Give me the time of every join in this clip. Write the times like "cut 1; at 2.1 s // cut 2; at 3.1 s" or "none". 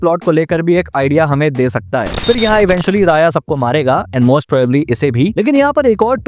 cut 1; at 2.1 s